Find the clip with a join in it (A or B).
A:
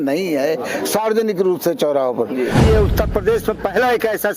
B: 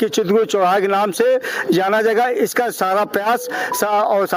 A